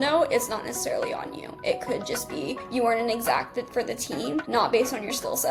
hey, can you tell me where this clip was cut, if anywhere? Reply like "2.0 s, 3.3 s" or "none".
none